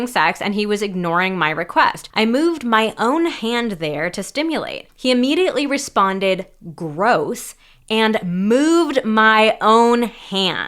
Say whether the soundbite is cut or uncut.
cut